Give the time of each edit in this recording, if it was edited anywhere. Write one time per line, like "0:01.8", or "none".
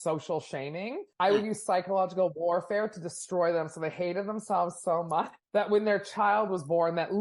0:01.0